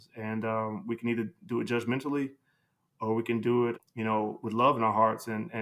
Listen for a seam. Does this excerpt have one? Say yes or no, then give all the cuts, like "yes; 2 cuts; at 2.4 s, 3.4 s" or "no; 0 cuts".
yes; 1 cut; at 3.8 s